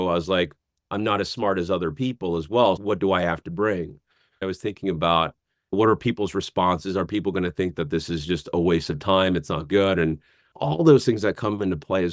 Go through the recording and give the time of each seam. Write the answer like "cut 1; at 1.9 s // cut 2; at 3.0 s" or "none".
cut 1; at 2.8 s // cut 2; at 4.4 s